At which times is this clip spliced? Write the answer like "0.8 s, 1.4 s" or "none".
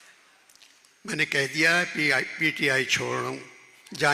none